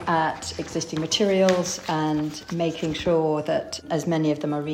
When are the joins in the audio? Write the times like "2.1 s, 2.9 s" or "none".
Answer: none